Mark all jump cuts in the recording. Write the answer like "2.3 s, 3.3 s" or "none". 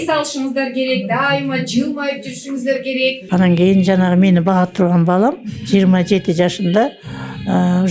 3.2 s